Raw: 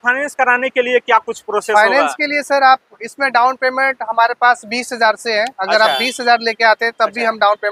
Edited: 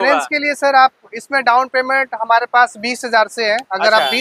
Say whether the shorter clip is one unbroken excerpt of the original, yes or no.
yes